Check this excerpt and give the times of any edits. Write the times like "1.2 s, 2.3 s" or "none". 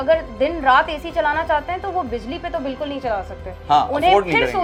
none